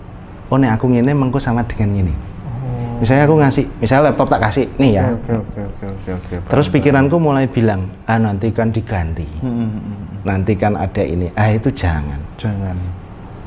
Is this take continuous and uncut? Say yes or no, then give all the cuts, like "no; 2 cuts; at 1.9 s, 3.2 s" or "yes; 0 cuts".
yes; 0 cuts